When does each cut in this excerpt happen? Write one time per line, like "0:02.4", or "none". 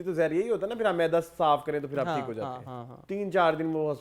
0:02.9